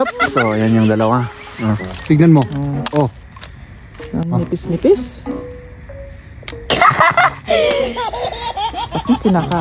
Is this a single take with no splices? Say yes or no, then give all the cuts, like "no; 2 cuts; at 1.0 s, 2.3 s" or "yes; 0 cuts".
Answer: no; 1 cut; at 1.9 s